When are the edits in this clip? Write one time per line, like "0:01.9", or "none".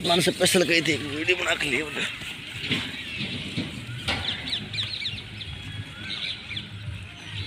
none